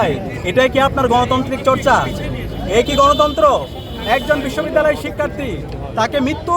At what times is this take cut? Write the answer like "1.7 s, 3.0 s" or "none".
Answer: none